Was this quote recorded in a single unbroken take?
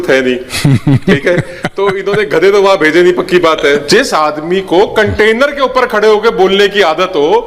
no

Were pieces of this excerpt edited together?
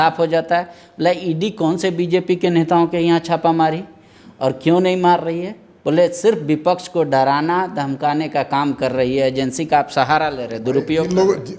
no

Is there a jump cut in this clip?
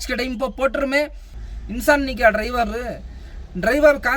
yes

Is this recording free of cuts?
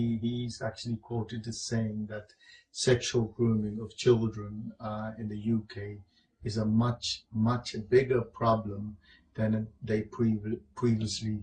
no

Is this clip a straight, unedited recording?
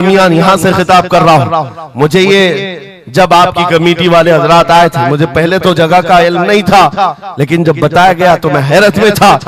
yes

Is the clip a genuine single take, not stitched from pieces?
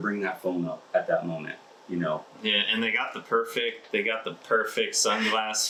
yes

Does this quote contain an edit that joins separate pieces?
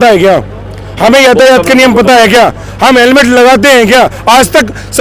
no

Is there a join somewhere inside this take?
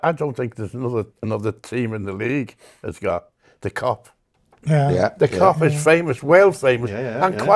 no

